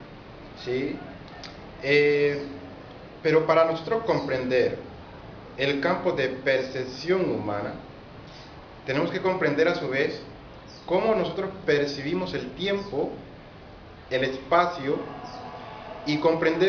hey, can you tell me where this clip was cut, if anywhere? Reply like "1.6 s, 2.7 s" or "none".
12.6 s

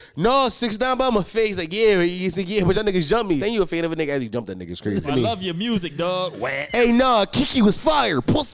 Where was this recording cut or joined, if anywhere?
3.4 s, 5.1 s, 6.6 s

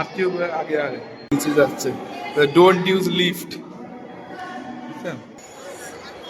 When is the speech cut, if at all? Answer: 1.3 s, 5.4 s

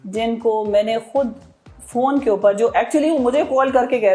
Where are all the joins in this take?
none

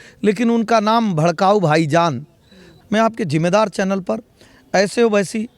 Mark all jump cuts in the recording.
2.7 s

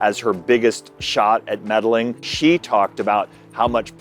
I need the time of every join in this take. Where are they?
2.3 s

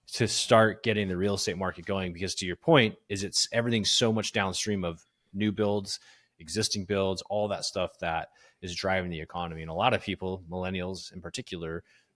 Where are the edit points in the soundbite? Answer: none

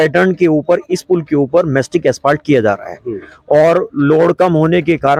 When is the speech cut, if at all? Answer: none

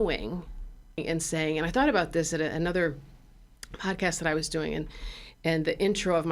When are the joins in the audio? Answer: 1.0 s

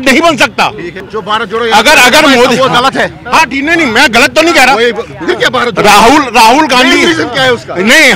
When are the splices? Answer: 0.9 s

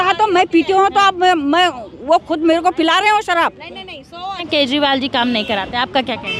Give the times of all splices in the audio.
4.5 s

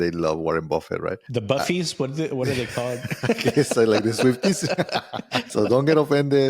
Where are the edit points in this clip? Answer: 1.2 s, 5.5 s

